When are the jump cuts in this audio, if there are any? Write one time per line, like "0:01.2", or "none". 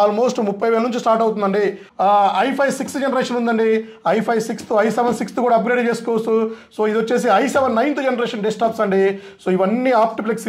0:01.9